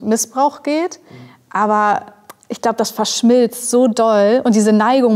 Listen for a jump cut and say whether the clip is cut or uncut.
uncut